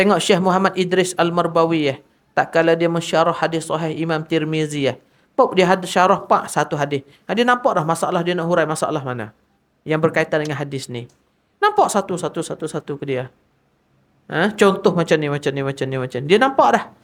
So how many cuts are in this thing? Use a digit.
0